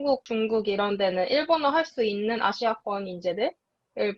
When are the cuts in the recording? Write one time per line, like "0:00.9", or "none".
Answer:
none